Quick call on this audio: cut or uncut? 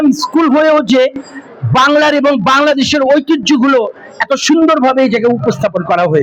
uncut